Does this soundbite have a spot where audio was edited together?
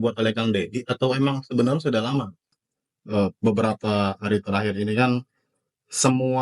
yes; 1 cut; at 2.5 s

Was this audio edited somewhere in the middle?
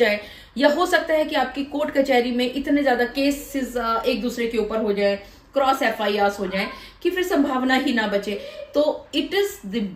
no; 0 cuts

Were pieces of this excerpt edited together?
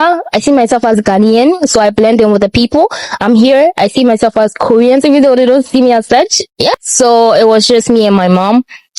yes; 1 cut; at 6.7 s

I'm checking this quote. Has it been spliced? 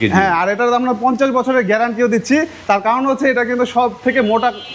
no; 0 cuts

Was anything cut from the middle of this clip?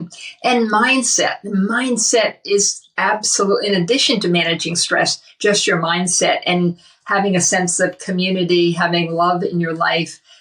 no; 0 cuts

